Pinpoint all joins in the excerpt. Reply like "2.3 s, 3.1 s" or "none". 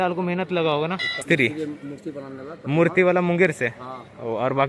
1.2 s

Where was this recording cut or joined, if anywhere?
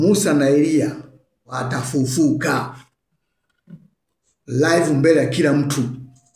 1.6 s

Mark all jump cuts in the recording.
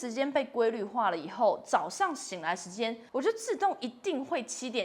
3.0 s

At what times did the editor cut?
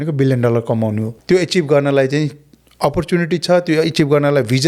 1.1 s

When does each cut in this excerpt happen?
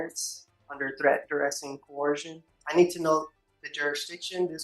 2.6 s

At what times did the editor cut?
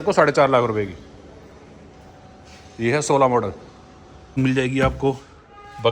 4.4 s

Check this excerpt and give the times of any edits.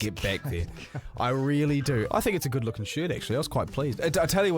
2.1 s

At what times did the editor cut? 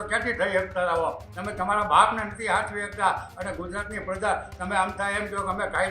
none

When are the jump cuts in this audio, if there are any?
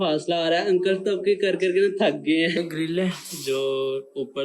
2.5 s

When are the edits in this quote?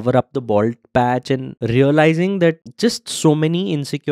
1.5 s, 2.7 s

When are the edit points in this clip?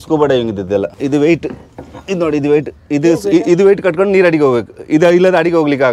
0.9 s

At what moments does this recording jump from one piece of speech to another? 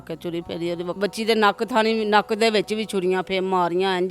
1.0 s

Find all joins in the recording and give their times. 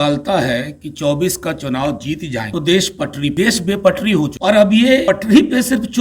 2.5 s, 3.3 s, 4.3 s, 5.0 s

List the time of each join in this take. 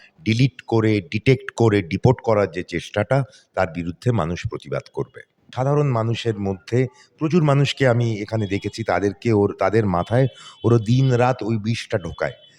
5.5 s

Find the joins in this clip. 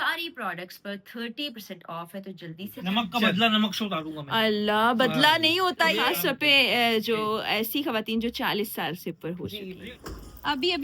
2.8 s, 6.0 s, 9.7 s

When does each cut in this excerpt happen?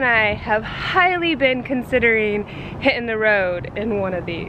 none

